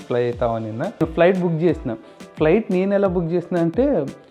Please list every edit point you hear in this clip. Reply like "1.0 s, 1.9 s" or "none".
1.0 s